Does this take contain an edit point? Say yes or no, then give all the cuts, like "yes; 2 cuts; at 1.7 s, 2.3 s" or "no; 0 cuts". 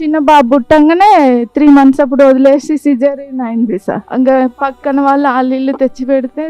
yes; 1 cut; at 4.0 s